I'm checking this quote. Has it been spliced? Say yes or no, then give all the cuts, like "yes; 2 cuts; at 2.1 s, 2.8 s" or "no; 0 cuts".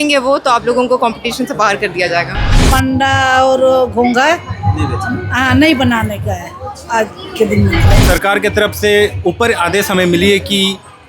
yes; 2 cuts; at 2.7 s, 8.0 s